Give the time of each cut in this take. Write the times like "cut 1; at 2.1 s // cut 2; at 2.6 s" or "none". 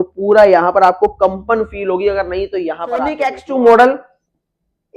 cut 1; at 3.3 s